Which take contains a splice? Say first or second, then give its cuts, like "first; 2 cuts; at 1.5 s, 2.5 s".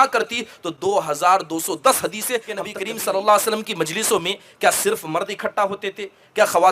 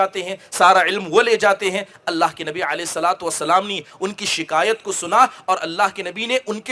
first; 1 cut; at 2.8 s